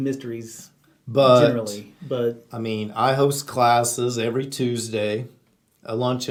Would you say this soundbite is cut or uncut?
uncut